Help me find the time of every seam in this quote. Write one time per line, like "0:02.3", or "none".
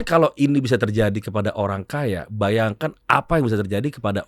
none